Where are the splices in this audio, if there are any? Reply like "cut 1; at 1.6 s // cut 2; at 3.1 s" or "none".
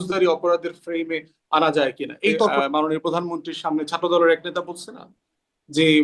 cut 1; at 2.5 s